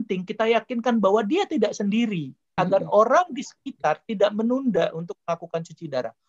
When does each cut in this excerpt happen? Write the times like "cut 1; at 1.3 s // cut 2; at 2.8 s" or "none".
cut 1; at 2.4 s